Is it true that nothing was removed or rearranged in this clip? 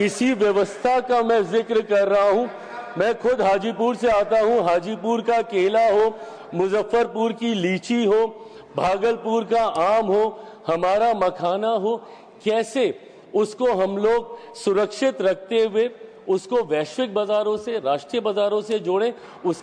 yes; 0 cuts

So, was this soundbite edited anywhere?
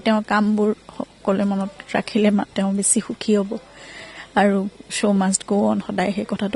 no; 0 cuts

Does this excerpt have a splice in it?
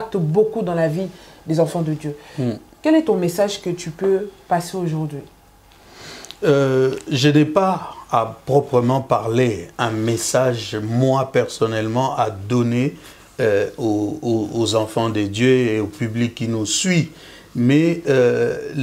no; 0 cuts

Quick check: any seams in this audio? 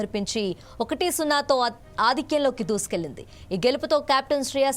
no; 0 cuts

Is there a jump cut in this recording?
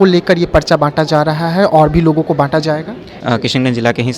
yes; 1 cut; at 3.1 s

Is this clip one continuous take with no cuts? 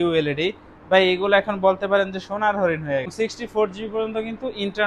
no; 1 cut; at 3.1 s

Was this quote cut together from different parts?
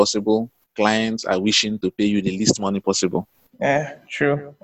no; 0 cuts

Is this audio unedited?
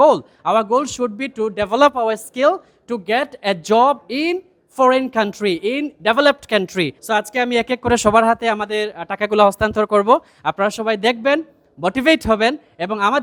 yes; 0 cuts

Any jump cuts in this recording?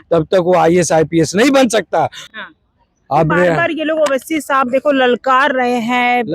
yes; 1 cut; at 2.3 s

